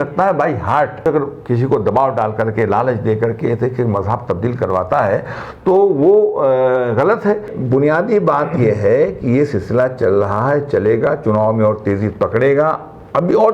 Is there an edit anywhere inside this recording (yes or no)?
yes